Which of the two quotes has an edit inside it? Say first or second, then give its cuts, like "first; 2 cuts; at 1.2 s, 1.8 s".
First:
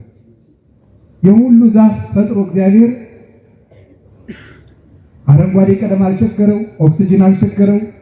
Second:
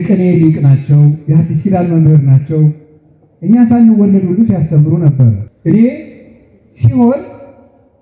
second; 1 cut; at 5.5 s